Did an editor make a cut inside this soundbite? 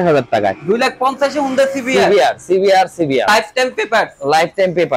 yes; 1 cut; at 3.3 s

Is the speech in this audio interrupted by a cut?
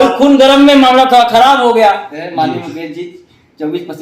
yes; 1 cut; at 2.1 s

